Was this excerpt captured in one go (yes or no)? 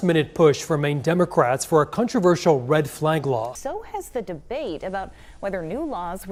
yes